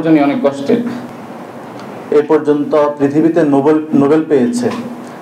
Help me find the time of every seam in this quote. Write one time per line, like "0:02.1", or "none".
0:01.1